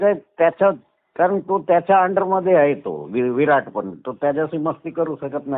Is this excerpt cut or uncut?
uncut